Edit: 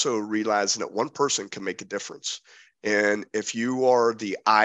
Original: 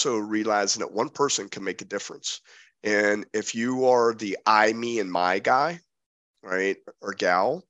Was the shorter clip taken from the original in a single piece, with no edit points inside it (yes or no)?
yes